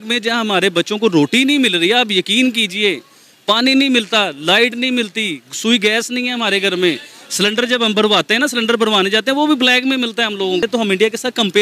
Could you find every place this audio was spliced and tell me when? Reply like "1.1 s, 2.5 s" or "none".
10.6 s